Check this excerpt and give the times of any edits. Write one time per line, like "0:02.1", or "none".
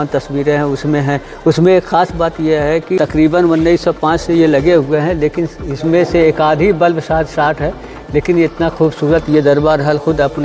0:03.0